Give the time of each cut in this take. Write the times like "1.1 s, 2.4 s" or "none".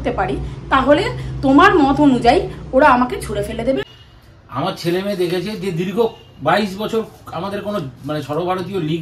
3.8 s